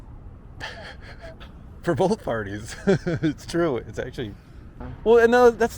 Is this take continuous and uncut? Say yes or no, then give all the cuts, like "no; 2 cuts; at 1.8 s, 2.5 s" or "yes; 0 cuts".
no; 1 cut; at 4.8 s